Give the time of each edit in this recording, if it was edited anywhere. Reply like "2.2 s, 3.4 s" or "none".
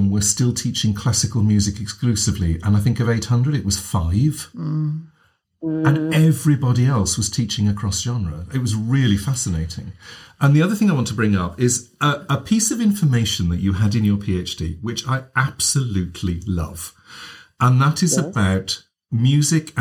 none